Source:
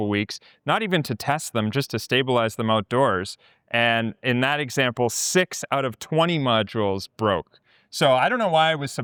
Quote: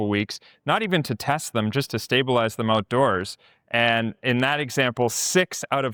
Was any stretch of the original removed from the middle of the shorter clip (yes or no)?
no